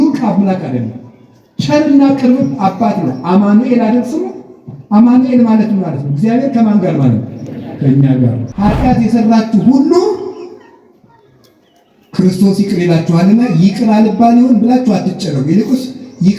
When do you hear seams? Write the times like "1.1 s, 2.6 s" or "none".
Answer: 8.4 s